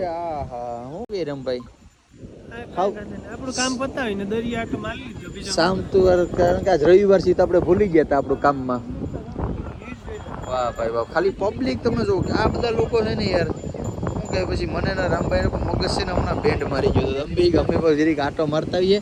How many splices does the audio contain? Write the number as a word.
zero